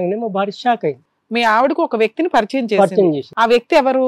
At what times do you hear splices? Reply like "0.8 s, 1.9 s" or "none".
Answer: 1.0 s